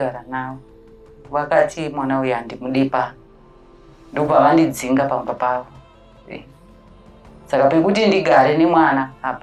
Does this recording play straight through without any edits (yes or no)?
yes